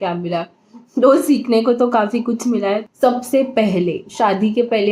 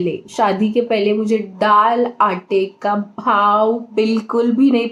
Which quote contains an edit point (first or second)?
first